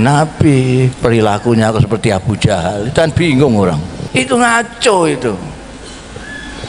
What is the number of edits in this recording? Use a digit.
1